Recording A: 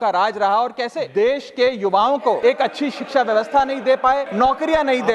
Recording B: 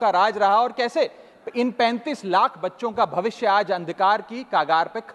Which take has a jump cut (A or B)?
A